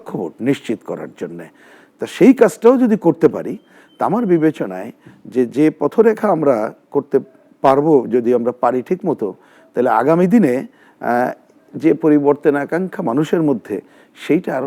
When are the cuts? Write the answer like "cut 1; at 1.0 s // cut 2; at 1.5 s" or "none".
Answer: none